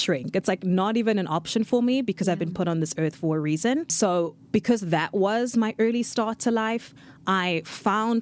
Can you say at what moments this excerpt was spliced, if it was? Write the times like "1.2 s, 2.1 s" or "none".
3.9 s